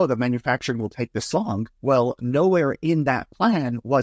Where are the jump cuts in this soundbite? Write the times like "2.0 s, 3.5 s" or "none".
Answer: 1.7 s